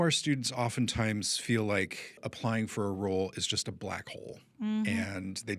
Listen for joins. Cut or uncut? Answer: cut